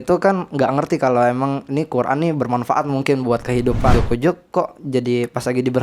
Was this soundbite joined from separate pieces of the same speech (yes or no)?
yes